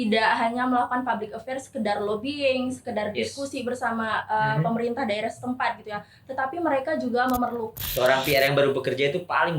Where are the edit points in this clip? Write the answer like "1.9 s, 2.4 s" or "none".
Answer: 7.7 s